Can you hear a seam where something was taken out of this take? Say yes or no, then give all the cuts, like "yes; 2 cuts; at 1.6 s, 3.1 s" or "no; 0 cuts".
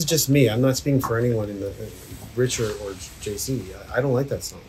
no; 0 cuts